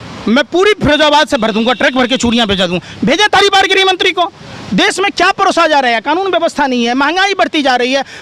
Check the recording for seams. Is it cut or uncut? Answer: uncut